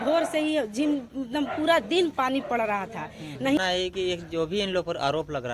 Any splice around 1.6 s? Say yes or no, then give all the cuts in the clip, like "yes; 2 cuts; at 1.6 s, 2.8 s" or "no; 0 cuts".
no; 1 cut; at 3.6 s